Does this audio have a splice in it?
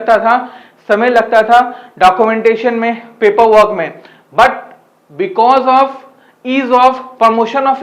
no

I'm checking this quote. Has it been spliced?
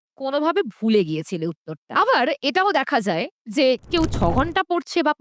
yes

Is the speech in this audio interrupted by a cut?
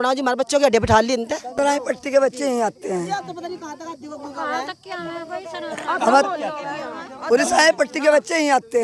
no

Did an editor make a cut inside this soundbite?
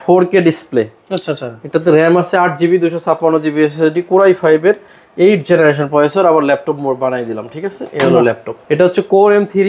yes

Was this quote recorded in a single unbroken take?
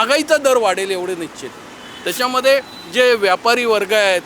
yes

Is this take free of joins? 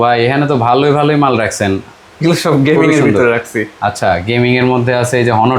yes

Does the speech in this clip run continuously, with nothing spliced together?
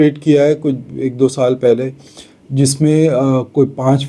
yes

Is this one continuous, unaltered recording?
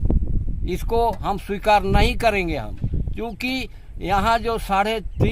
yes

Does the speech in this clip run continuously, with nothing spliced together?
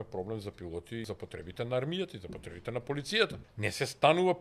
no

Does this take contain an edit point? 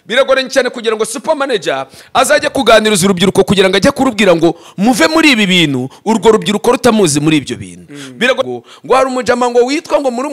yes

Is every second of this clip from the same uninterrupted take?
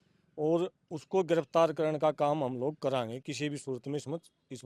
yes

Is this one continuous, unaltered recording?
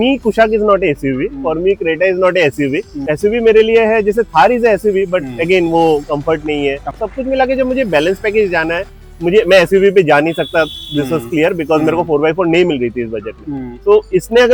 yes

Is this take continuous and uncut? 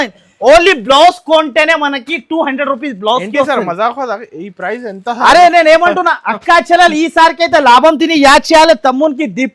yes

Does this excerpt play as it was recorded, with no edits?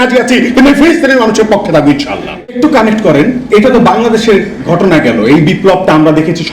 no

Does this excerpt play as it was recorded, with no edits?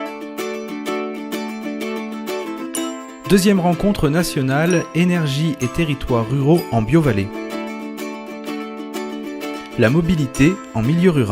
no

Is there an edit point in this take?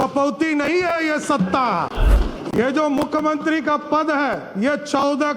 yes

